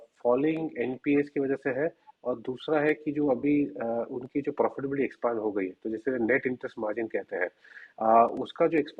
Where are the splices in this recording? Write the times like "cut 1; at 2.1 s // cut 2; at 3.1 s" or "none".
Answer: none